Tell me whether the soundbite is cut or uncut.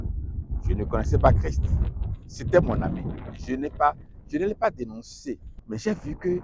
cut